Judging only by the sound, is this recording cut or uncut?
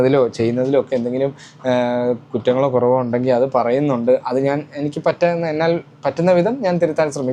uncut